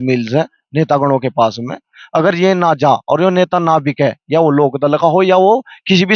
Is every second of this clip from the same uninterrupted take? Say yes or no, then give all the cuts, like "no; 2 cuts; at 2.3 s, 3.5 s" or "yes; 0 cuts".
yes; 0 cuts